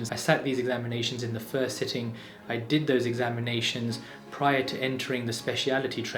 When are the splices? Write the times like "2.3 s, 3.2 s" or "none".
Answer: none